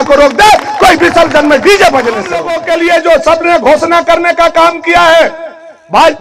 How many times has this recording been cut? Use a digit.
1